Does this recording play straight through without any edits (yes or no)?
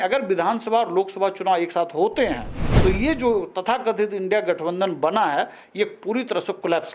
yes